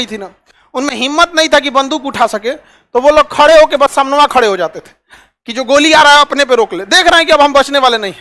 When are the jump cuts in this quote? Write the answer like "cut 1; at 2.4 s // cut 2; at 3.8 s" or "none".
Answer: none